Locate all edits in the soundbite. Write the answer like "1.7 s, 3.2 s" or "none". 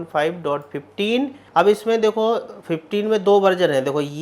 1.4 s